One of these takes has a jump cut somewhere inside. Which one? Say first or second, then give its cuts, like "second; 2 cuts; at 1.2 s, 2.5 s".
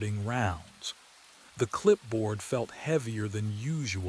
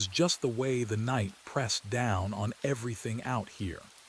first; 1 cut; at 2.0 s